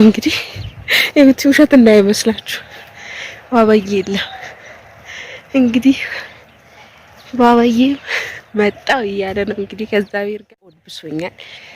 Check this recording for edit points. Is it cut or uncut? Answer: cut